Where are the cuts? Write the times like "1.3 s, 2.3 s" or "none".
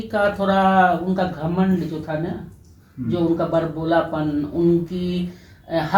none

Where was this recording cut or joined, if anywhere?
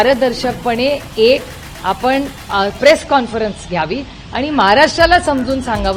none

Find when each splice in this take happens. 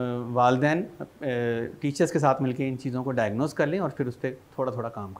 none

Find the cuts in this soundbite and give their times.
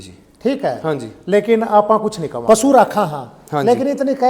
2.3 s

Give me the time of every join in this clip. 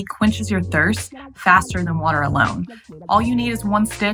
2.9 s

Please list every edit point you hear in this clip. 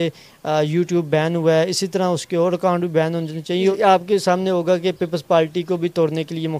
3.6 s

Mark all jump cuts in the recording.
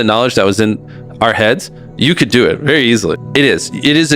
3.2 s

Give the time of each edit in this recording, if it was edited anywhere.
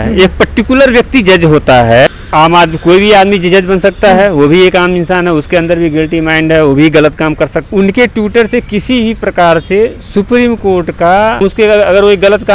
2.1 s, 7.6 s, 11.4 s

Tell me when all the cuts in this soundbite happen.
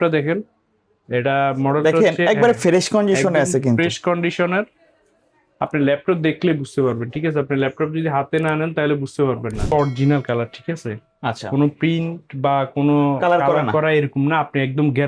9.7 s

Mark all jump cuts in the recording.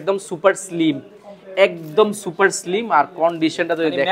none

